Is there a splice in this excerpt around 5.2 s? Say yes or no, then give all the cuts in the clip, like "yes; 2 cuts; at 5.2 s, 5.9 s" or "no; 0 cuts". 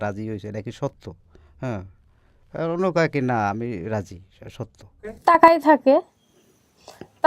yes; 1 cut; at 5.2 s